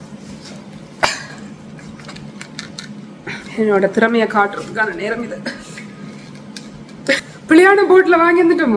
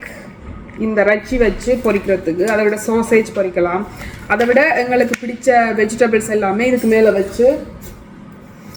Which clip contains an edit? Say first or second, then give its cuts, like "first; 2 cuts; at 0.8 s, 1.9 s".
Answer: first; 1 cut; at 7.0 s